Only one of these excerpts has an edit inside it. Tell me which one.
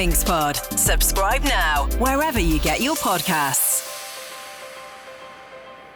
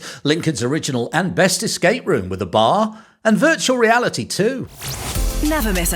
second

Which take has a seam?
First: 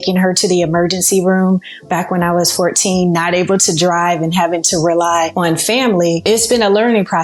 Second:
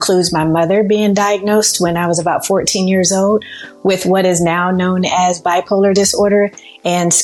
first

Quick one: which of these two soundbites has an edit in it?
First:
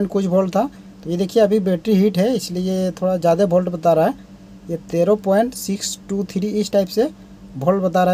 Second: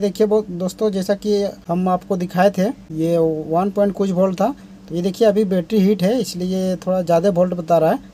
second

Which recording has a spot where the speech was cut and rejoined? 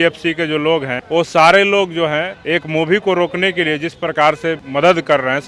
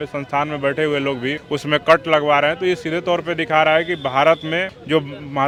first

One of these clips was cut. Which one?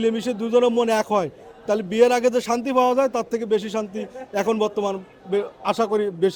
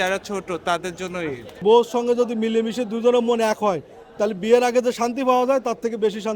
second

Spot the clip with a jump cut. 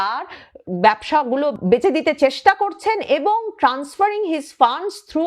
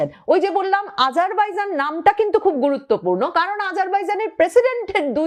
first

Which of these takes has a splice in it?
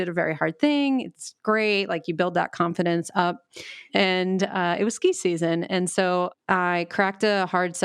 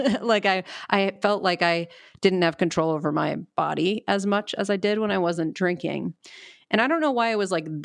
first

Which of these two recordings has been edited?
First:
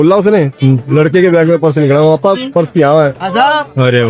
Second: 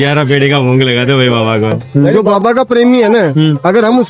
second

